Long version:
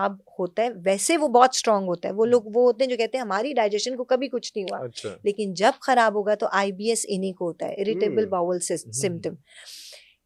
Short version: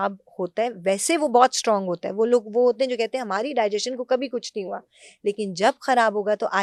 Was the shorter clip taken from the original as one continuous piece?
yes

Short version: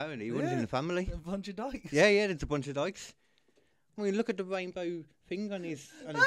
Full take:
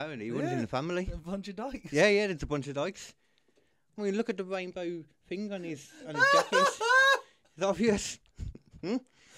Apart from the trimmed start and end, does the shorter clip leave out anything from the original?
no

